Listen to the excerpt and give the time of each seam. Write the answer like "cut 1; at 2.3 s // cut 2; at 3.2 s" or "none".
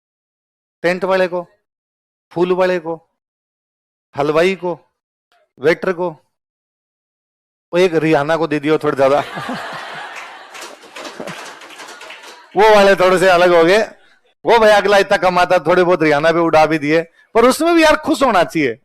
none